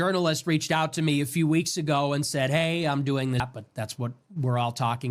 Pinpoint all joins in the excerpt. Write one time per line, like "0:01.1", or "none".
0:03.4